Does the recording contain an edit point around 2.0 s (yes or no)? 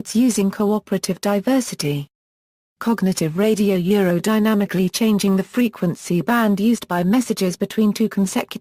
yes